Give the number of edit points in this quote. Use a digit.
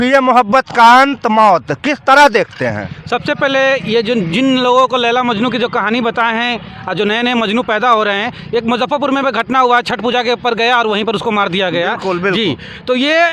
0